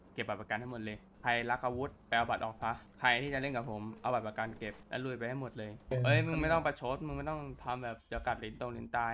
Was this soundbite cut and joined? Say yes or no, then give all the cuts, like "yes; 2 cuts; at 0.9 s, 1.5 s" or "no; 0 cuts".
yes; 5 cuts; at 1.1 s, 2.0 s, 2.9 s, 4.8 s, 5.9 s